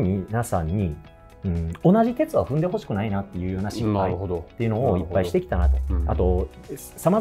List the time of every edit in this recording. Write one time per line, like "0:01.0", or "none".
none